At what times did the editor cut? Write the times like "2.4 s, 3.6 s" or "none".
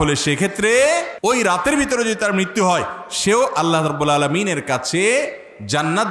1.1 s